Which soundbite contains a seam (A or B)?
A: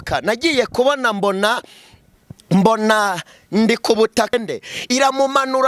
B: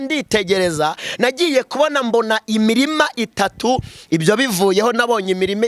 A